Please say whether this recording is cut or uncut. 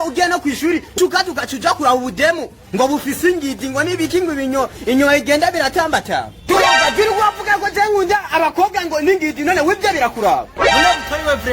cut